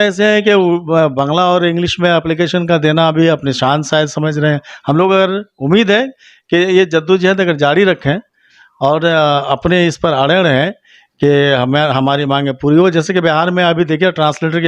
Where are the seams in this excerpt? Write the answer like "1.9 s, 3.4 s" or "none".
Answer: none